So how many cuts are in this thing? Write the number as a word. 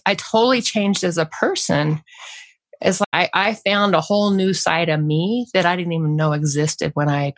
one